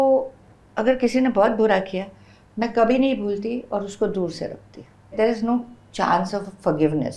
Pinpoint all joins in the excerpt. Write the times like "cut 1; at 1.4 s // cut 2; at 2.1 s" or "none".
cut 1; at 5.1 s